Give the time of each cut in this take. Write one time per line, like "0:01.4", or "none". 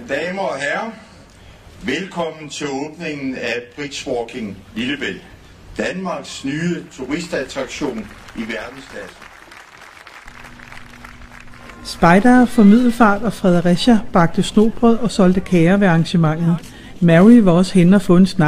0:09.1